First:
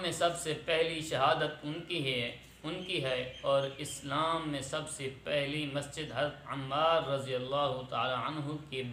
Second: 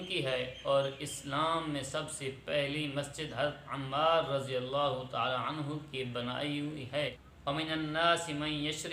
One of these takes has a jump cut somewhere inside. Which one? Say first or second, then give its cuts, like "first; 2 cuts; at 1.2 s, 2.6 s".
second; 1 cut; at 7.3 s